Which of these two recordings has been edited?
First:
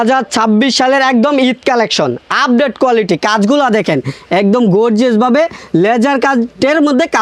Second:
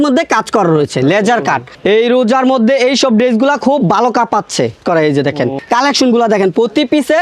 second; 3 cuts; at 1.7 s, 4.8 s, 5.6 s

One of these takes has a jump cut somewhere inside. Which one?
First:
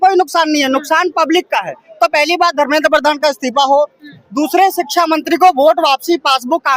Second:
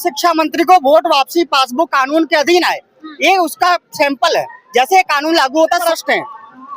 second; 1 cut; at 5.9 s

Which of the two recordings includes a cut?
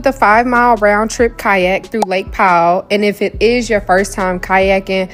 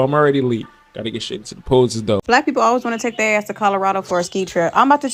second; 1 cut; at 2.2 s

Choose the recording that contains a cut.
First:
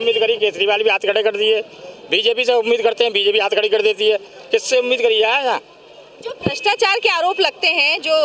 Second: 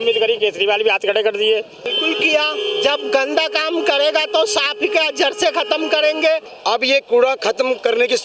second; 2 cuts; at 2.0 s, 6.5 s

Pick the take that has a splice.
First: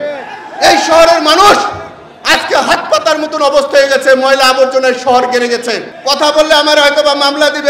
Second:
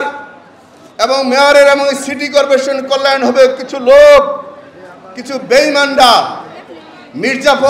first; 1 cut; at 5.9 s

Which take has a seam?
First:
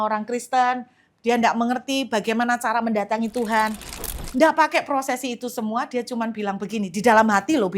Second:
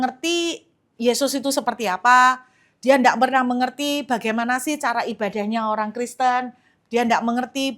first; 1 cut; at 4.2 s

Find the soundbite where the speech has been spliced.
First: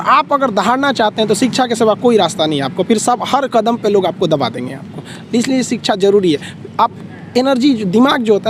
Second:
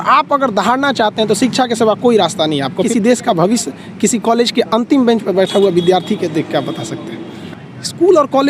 second; 2 cuts; at 2.9 s, 7.4 s

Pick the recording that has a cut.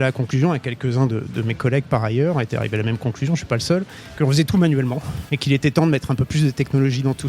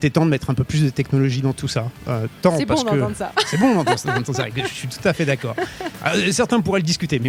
first; 1 cut; at 4.0 s

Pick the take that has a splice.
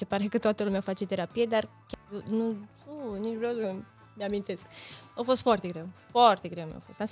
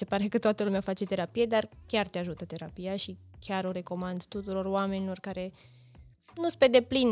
first; 1 cut; at 1.8 s

